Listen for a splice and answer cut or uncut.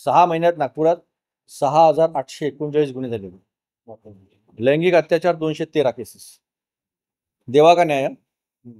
uncut